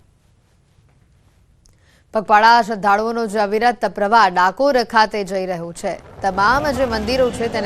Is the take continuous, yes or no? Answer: no